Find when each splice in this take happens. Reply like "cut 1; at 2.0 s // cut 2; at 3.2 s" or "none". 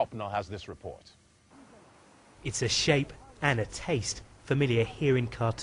cut 1; at 1.3 s